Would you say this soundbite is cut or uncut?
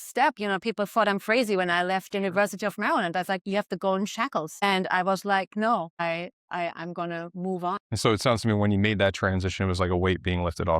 cut